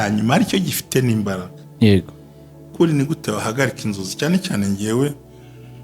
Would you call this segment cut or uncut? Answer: cut